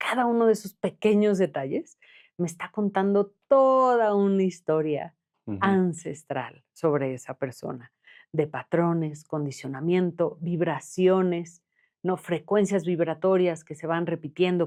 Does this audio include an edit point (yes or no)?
no